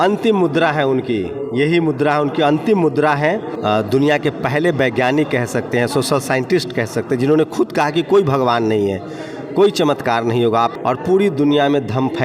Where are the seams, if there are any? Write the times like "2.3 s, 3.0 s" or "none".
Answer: 3.5 s, 10.7 s